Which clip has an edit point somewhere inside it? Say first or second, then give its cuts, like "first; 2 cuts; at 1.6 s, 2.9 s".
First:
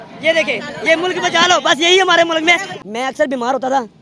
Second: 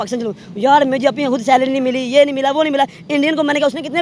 first; 1 cut; at 2.7 s